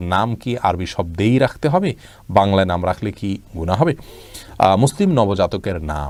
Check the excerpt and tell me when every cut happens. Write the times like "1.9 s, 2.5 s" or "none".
none